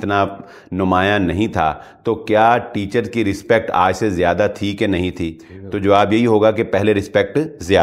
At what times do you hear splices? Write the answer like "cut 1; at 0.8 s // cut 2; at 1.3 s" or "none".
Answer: none